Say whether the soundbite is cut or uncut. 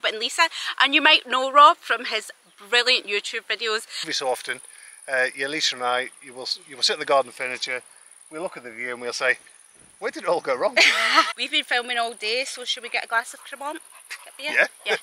cut